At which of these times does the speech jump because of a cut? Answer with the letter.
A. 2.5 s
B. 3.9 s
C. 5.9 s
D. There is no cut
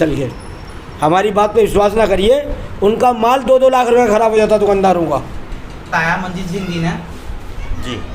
C